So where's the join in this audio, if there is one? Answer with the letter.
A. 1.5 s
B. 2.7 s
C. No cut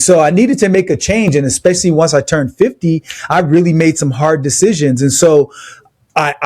C